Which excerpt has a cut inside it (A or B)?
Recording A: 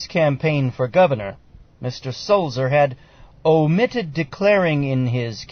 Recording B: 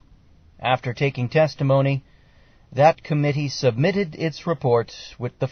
B